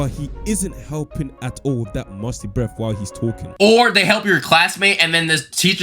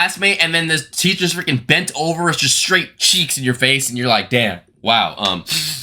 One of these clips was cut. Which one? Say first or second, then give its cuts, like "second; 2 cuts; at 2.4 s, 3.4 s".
first; 1 cut; at 3.5 s